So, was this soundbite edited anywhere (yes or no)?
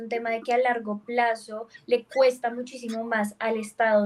no